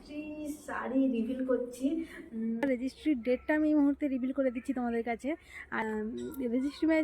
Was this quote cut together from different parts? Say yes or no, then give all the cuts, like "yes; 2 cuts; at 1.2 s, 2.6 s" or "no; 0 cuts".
yes; 2 cuts; at 2.6 s, 5.8 s